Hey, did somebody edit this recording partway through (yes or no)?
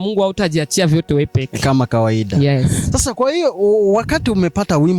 no